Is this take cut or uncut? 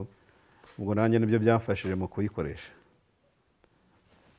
cut